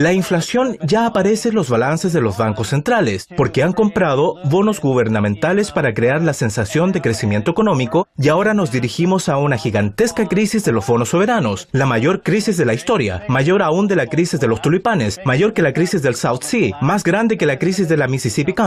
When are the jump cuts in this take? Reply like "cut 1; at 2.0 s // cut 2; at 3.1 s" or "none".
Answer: none